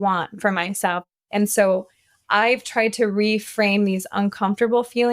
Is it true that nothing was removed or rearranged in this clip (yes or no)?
no